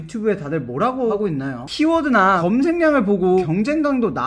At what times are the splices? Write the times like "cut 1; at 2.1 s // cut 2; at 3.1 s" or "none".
cut 1; at 1.1 s // cut 2; at 2.4 s // cut 3; at 3.4 s